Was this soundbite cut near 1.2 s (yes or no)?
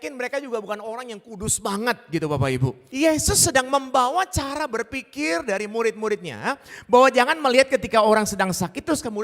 no